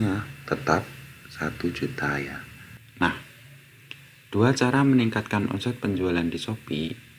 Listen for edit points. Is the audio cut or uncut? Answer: cut